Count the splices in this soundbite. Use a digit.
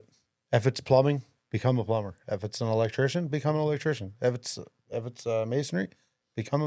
0